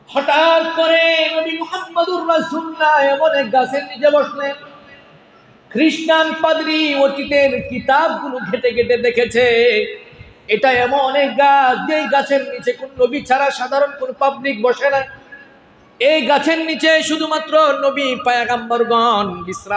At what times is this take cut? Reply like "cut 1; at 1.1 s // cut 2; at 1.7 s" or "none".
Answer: none